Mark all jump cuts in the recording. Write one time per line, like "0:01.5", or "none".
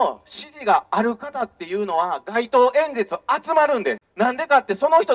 0:04.0